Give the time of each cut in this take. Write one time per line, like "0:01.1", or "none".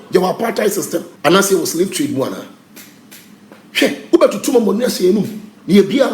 0:01.0